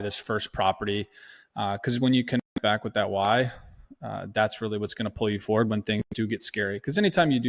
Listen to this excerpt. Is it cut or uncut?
uncut